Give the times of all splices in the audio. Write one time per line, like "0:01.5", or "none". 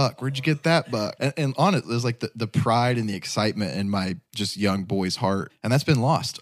0:01.1
0:05.5

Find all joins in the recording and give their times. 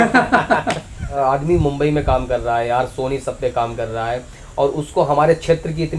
0:01.1

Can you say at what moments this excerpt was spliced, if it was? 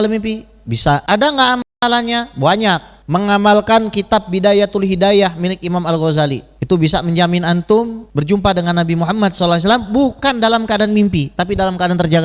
0:01.0
0:02.9
0:06.5
0:08.1

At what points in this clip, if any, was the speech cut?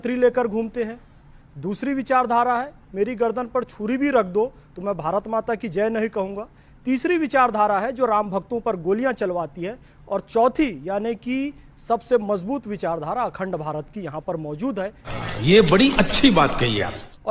none

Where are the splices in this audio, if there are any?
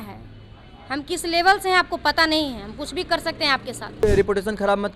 0:04.0

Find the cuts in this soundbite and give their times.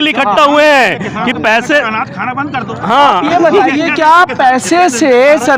none

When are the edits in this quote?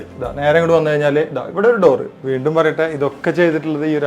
0:02.1

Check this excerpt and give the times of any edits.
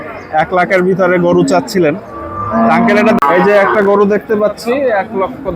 0:03.2

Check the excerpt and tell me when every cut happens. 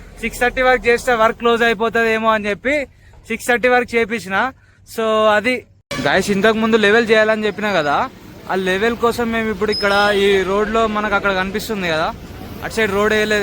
0:05.8

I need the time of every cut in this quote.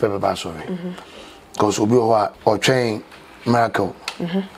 0:02.4

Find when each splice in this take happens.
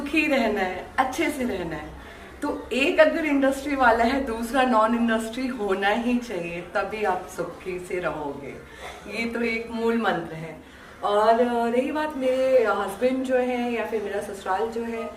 none

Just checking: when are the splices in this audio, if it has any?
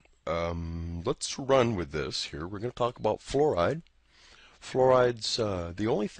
0:02.2

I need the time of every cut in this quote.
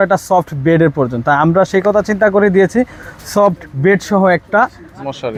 none

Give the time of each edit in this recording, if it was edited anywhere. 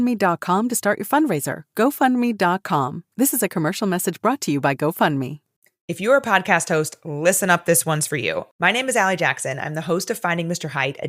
0:05.4

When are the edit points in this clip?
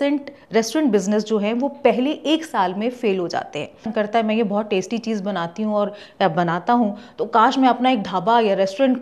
0:03.9

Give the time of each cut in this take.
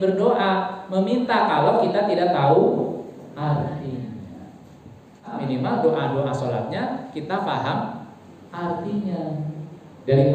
0:05.4

